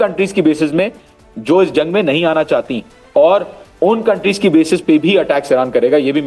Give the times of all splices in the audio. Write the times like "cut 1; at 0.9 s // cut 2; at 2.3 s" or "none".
none